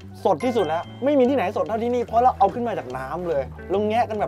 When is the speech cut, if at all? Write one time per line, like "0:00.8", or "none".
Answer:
none